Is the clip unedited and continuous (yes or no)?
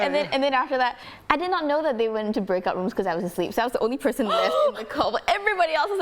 no